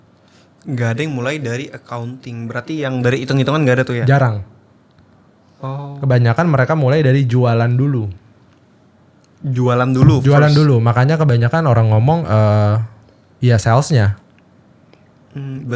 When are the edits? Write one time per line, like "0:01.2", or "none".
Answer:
none